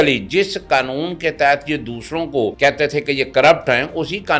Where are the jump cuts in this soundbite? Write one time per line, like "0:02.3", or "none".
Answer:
0:02.5